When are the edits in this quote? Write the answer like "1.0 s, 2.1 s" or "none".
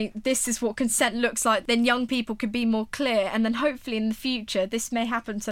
1.6 s